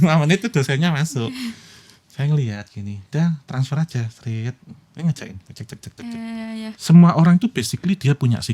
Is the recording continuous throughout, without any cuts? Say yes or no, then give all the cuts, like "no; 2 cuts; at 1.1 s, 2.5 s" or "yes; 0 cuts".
no; 1 cut; at 6.7 s